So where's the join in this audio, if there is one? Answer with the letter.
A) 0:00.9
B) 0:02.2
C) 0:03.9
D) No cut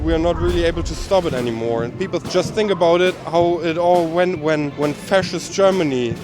B